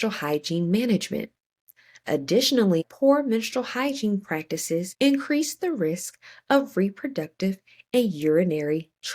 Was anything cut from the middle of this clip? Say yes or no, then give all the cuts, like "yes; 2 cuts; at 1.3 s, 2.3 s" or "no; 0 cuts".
yes; 2 cuts; at 2.8 s, 4.9 s